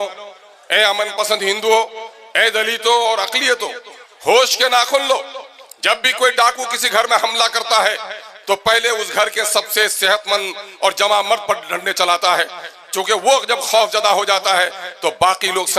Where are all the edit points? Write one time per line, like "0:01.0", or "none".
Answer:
none